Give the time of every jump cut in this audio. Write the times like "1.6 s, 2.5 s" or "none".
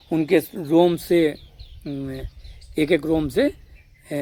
none